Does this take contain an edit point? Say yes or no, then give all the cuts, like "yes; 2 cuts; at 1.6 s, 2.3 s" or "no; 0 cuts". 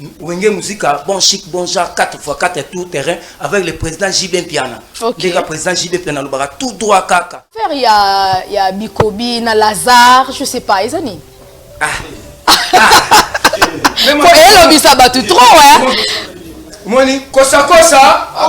yes; 1 cut; at 7.7 s